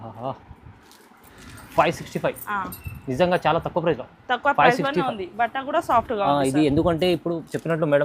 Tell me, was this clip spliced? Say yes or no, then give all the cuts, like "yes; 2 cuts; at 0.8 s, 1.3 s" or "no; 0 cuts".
yes; 1 cut; at 1.4 s